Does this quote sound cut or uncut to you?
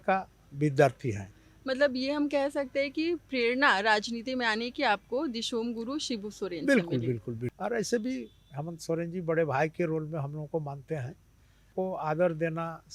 cut